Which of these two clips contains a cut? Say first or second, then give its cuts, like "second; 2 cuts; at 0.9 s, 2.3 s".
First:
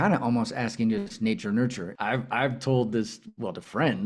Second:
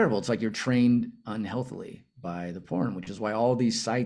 first; 1 cut; at 1.9 s